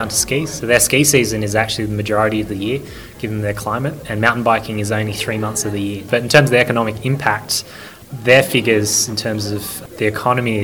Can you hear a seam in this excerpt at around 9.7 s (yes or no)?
yes